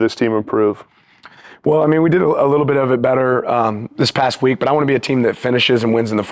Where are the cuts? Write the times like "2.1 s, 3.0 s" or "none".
none